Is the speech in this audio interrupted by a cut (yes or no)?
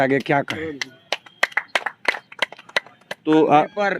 no